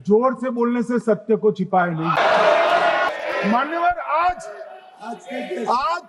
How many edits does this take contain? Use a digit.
2